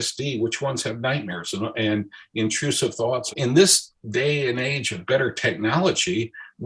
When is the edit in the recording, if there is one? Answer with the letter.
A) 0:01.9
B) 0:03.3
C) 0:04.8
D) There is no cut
B